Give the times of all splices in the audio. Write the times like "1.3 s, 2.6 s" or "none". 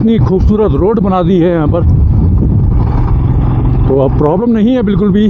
none